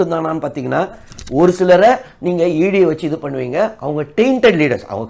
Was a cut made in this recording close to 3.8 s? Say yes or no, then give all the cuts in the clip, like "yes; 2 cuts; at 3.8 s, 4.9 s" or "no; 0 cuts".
no; 1 cut; at 1.1 s